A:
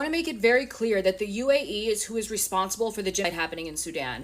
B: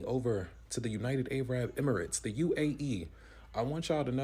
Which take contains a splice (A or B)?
A